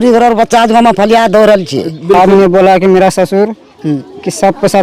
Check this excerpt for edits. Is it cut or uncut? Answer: cut